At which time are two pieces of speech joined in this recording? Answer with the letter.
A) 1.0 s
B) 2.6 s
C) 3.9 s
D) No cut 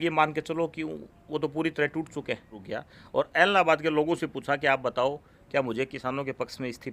B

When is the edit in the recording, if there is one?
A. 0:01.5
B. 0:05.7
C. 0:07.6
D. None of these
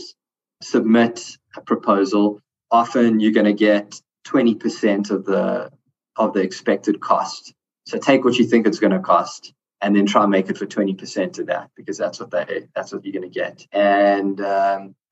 D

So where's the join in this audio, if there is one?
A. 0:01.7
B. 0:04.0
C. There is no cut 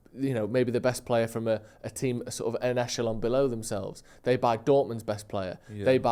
C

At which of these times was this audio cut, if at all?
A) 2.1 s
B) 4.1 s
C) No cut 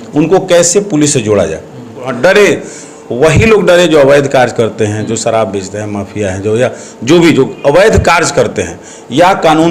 A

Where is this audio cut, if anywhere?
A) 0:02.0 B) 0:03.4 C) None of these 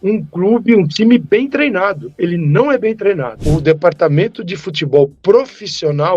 B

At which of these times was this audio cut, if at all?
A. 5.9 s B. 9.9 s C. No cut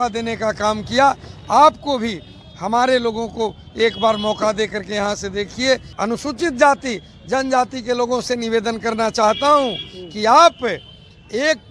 A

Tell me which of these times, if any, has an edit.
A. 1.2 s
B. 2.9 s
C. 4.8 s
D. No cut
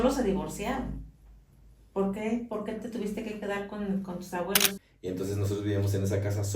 C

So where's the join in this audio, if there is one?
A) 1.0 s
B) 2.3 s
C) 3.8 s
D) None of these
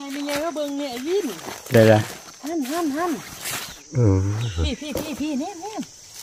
C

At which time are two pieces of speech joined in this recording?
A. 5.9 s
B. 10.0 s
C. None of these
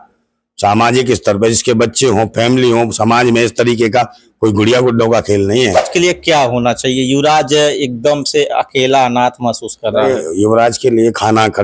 A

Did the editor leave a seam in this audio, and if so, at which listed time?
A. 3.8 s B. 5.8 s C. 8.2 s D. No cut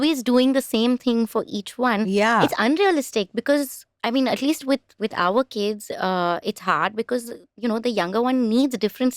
D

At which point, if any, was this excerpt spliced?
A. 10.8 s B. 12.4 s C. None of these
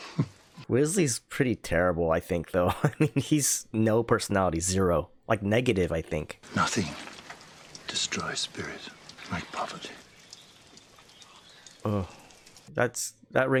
C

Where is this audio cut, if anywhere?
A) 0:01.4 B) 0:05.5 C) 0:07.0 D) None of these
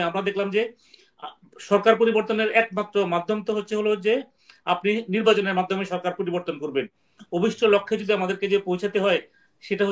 C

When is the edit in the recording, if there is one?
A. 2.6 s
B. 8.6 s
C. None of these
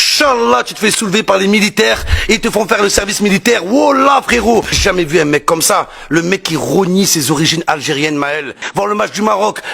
B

